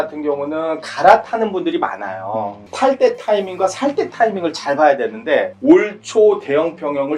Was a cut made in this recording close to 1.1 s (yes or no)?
no